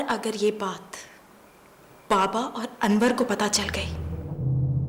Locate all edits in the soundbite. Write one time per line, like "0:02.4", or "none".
0:04.0